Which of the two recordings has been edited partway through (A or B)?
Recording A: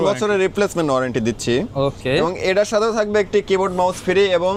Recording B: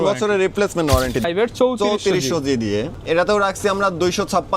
B